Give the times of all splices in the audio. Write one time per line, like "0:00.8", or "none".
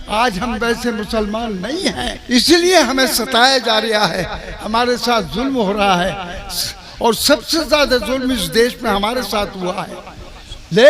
0:02.2